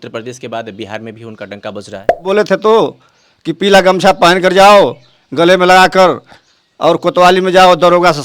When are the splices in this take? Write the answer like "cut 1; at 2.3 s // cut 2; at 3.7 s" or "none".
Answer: cut 1; at 2.3 s

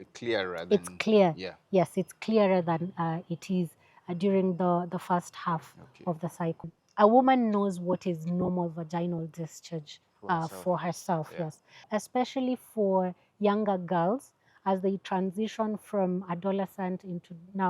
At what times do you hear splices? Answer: cut 1; at 6.8 s // cut 2; at 11.8 s

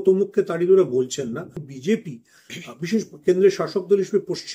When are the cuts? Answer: cut 1; at 1.7 s

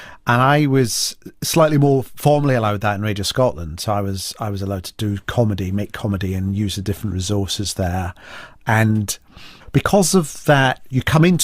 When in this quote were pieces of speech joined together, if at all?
cut 1; at 3.8 s

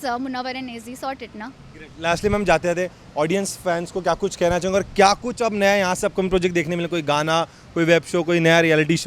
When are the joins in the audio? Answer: none

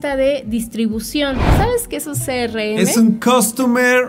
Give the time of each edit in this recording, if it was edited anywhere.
cut 1; at 1.5 s

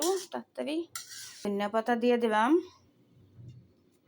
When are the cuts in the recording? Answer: cut 1; at 1.5 s

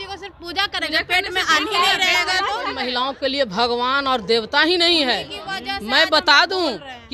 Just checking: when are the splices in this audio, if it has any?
cut 1; at 2.8 s

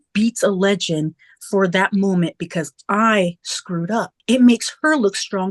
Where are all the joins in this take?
cut 1; at 4.1 s

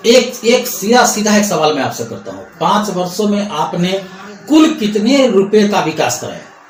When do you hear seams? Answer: none

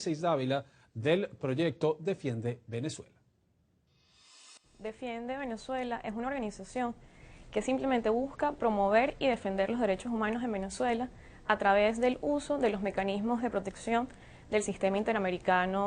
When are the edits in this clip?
cut 1; at 8.0 s

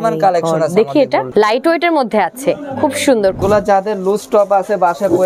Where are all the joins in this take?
cut 1; at 1.3 s // cut 2; at 3.4 s

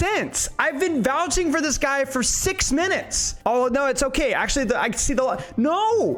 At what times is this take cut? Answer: none

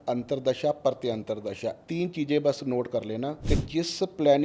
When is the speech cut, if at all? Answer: cut 1; at 1.8 s // cut 2; at 3.4 s

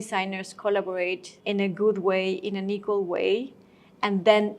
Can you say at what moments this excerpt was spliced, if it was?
cut 1; at 1.3 s

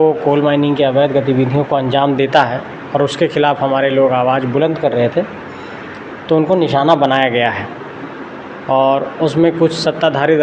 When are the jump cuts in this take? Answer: none

